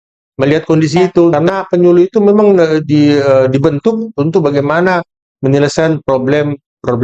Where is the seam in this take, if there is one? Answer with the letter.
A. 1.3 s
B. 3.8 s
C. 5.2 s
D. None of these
A